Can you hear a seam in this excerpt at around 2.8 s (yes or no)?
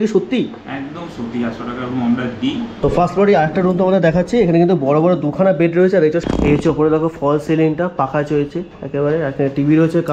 yes